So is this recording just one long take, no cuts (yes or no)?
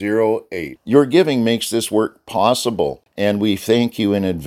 no